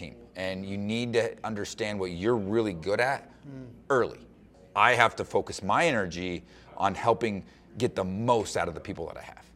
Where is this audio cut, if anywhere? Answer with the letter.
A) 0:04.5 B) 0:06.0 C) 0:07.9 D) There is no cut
A